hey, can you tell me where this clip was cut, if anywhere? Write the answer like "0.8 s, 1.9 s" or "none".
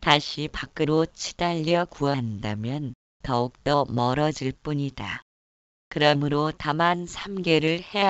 none